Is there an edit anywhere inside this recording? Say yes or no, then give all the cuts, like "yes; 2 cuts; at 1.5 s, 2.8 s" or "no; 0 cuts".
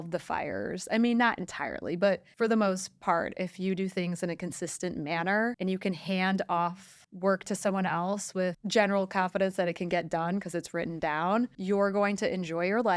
no; 0 cuts